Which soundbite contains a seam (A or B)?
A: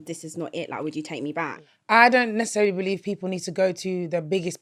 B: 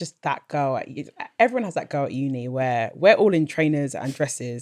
A